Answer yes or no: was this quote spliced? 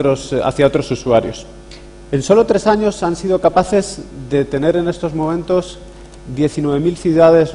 yes